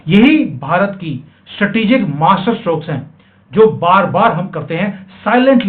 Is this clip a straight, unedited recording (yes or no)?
yes